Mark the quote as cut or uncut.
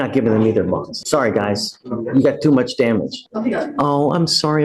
cut